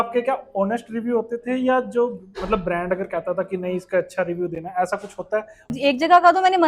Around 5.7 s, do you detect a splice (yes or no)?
yes